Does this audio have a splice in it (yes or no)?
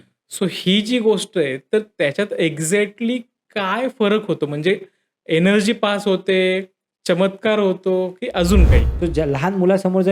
yes